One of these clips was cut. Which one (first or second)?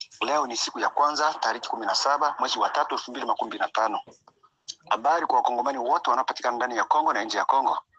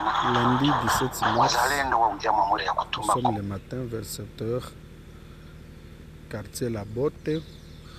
second